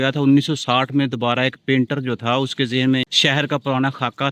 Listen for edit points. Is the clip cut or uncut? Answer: cut